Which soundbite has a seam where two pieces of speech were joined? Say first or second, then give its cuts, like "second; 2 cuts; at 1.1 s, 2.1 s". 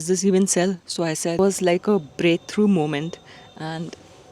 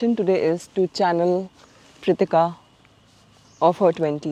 first; 1 cut; at 1.4 s